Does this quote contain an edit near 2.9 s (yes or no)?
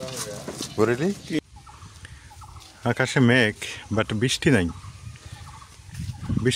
no